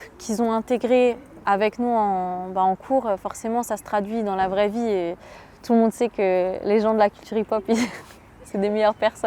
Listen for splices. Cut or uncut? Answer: uncut